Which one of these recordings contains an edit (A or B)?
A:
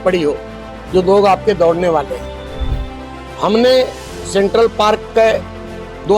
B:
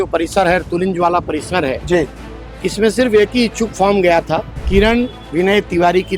B